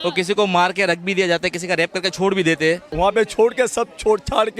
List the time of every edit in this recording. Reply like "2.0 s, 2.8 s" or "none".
2.9 s